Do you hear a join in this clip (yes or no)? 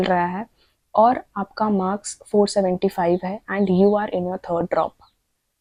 no